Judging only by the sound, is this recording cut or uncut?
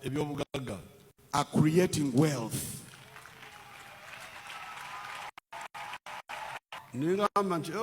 cut